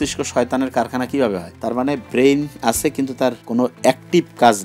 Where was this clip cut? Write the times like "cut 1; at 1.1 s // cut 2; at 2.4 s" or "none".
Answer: cut 1; at 2.0 s // cut 2; at 3.7 s